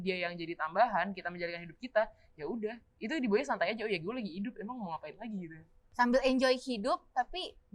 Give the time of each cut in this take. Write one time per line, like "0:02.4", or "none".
0:05.8

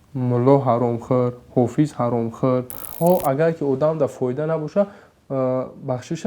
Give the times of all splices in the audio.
0:02.8

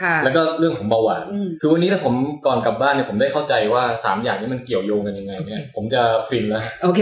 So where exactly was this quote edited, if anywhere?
0:01.5

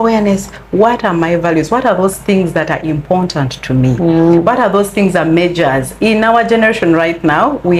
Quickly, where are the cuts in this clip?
none

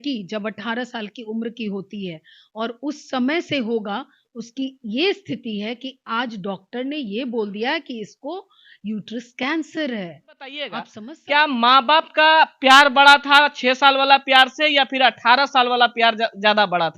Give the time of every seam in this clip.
0:10.9

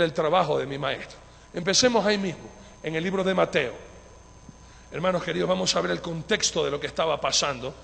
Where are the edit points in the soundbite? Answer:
none

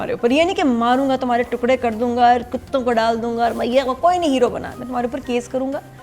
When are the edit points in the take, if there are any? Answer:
none

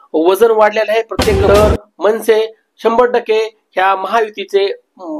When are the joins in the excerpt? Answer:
0:01.3

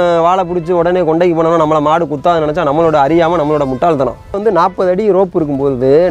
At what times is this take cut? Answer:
0:04.4

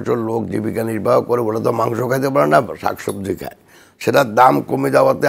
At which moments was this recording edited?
none

